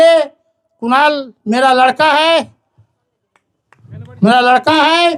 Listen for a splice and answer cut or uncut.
uncut